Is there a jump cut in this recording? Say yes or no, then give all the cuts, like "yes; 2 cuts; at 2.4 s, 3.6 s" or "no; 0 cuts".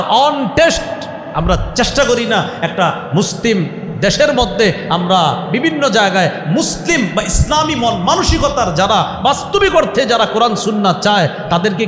no; 0 cuts